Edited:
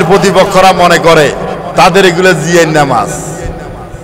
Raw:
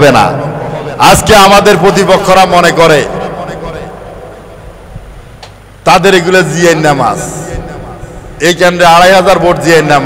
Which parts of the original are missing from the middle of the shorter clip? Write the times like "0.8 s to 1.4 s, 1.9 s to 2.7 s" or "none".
3.3 s to 5.7 s